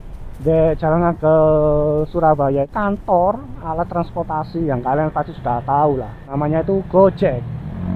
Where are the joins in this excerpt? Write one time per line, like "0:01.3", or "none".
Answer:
0:02.7
0:06.3